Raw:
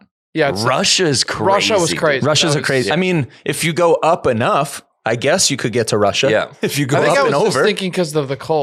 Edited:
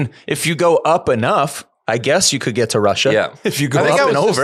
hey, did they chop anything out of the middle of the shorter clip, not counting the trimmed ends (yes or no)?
no